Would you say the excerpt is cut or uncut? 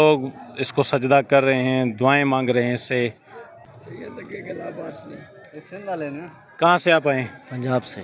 uncut